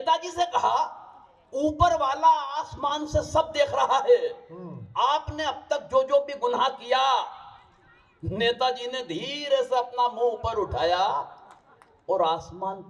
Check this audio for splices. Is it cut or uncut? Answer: uncut